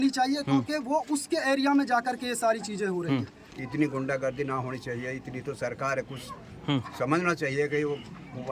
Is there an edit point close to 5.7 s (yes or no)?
no